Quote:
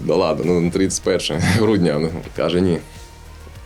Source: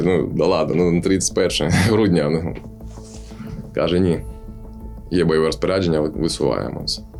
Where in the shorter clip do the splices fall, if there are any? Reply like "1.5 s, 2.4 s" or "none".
2.2 s